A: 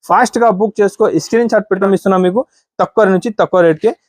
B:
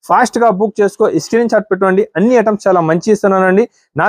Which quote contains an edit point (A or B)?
A